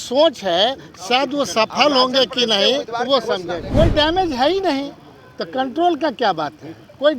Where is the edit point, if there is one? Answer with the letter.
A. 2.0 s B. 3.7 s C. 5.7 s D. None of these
B